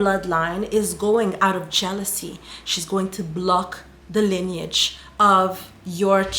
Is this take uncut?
yes; 0 cuts

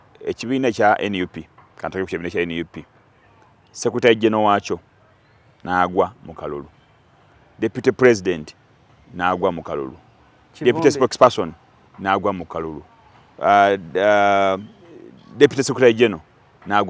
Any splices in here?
no; 0 cuts

